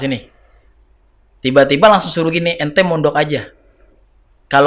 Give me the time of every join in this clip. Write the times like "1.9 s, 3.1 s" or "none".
none